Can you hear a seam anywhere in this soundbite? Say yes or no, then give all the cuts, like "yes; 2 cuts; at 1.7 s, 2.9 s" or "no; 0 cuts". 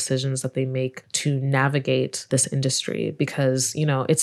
yes; 2 cuts; at 1.1 s, 2.3 s